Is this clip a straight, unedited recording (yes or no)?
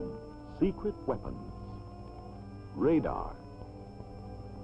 yes